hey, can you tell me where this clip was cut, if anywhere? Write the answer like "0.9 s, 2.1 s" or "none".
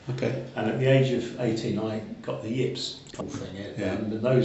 3.1 s